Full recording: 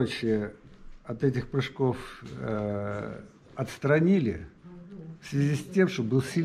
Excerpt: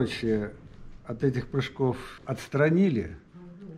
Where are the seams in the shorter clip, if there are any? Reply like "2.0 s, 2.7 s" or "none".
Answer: 2.1 s